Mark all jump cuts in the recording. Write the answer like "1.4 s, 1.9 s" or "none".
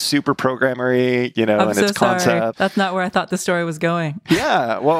2.5 s, 4.2 s